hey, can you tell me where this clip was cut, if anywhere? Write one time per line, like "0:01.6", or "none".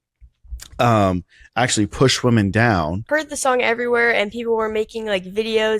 0:03.0